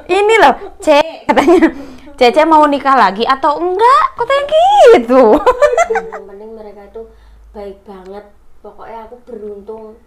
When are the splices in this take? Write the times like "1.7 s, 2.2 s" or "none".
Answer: 6.1 s